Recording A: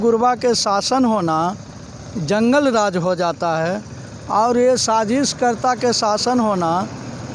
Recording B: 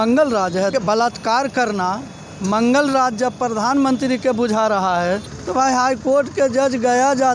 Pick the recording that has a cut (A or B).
B